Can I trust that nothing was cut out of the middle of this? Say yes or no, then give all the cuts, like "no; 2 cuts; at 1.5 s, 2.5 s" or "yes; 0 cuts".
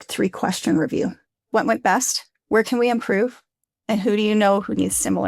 no; 1 cut; at 1.4 s